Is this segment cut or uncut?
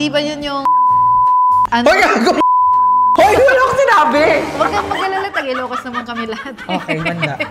uncut